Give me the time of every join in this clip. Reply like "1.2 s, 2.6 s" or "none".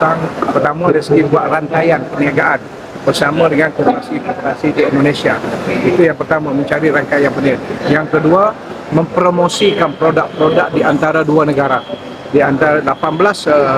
none